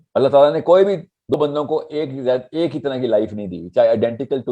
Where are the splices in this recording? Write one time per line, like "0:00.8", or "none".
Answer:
0:01.4